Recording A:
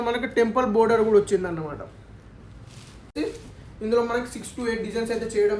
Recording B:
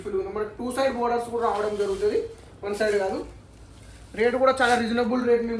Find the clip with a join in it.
A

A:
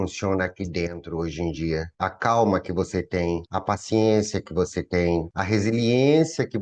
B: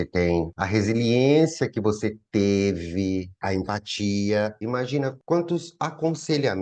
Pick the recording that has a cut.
B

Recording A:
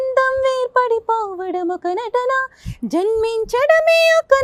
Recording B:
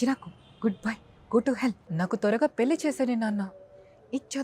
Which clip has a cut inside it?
B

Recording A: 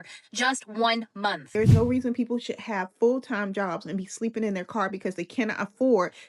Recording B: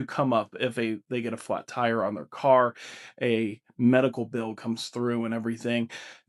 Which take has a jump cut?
A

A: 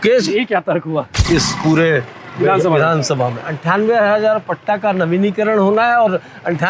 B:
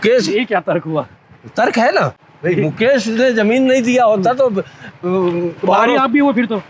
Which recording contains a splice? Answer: A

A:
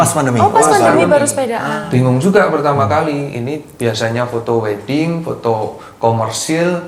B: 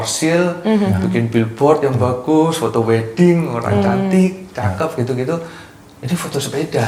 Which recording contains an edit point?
A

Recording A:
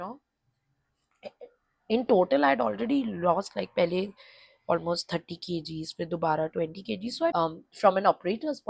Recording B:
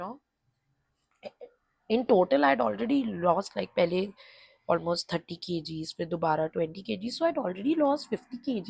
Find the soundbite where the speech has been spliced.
A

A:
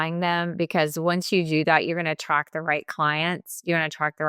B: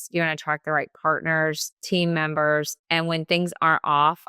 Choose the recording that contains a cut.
B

